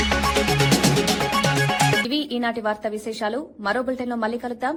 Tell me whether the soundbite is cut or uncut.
uncut